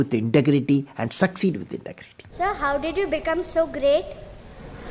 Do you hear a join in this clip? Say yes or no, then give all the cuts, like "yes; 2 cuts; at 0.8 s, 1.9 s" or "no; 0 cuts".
yes; 1 cut; at 2.3 s